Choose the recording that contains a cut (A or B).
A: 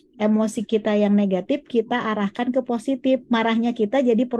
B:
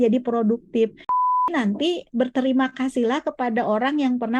B